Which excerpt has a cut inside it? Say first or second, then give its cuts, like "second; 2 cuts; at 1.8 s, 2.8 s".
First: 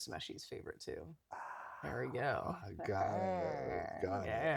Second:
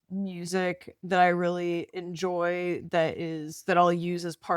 second; 1 cut; at 0.9 s